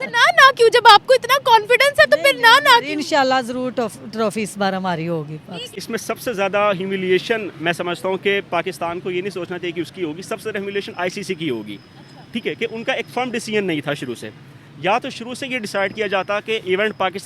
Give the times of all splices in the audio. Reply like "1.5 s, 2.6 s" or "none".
5.8 s